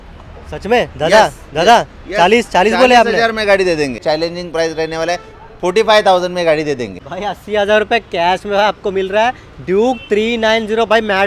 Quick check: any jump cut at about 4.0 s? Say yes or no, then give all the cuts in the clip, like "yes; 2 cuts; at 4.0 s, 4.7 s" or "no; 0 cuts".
yes; 2 cuts; at 4.0 s, 7.0 s